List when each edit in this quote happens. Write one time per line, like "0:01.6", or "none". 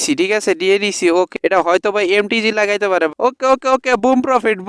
0:01.3
0:03.1